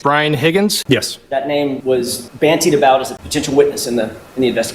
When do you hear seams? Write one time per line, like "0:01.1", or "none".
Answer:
0:00.8
0:01.8
0:03.2